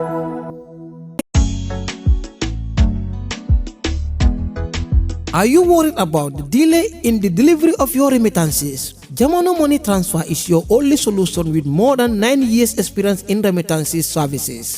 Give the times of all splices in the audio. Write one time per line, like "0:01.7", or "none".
0:01.0